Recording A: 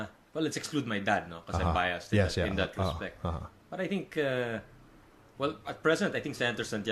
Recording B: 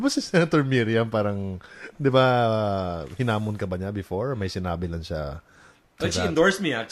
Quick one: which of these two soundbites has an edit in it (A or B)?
B